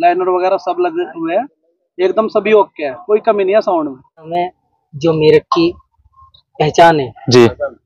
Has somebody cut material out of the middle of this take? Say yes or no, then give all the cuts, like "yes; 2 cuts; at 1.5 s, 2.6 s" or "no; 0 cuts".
yes; 1 cut; at 4.3 s